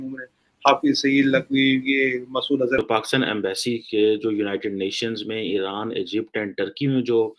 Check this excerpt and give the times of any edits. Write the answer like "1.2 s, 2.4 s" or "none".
2.8 s